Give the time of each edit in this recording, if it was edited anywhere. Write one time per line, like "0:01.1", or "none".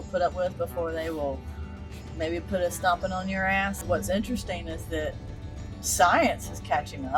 0:03.8